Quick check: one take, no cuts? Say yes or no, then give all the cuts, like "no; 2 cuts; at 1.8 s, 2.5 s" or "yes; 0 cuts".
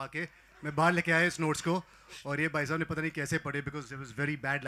yes; 0 cuts